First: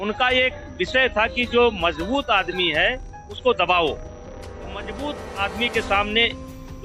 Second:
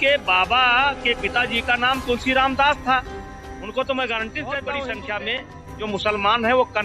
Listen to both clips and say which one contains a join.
second; 1 cut; at 4.8 s

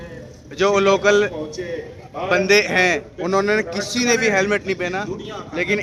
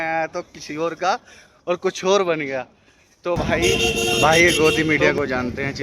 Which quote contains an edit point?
second; 1 cut; at 3.6 s

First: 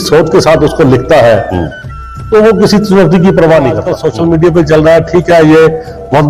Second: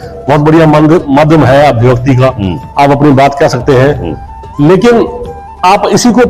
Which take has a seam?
first; 1 cut; at 3.9 s

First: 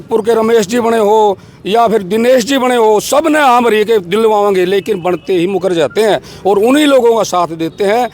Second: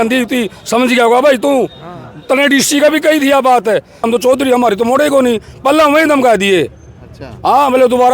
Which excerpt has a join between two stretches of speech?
second; 1 cut; at 4.1 s

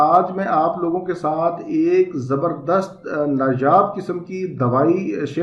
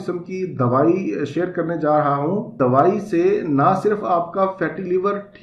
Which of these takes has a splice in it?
second; 1 cut; at 2.5 s

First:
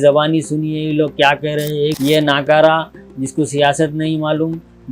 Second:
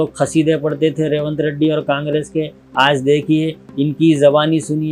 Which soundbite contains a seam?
first; 1 cut; at 2.0 s

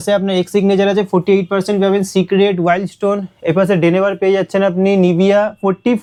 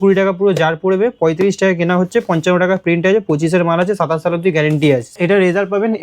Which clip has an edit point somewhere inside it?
second; 1 cut; at 5.1 s

